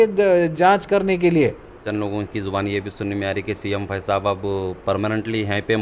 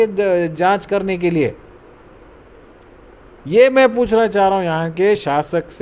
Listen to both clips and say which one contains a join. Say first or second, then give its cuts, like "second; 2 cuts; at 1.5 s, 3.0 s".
first; 1 cut; at 1.8 s